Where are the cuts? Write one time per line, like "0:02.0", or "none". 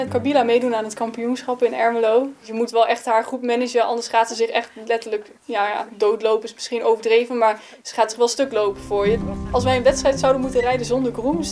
0:02.5
0:09.2